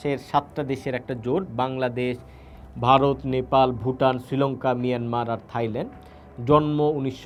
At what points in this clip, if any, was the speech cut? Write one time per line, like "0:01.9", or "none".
none